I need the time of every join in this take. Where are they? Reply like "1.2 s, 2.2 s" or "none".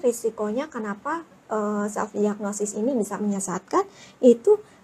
none